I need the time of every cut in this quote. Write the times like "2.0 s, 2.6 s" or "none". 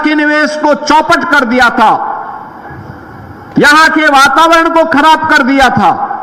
none